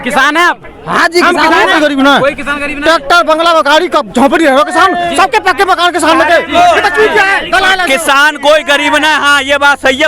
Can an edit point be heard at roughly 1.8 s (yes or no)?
yes